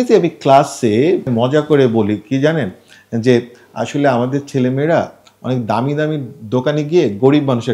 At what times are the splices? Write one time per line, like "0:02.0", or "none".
0:01.3